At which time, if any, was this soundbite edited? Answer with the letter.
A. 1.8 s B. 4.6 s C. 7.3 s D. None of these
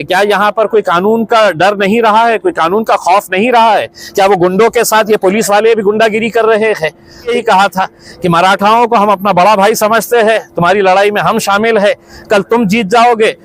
C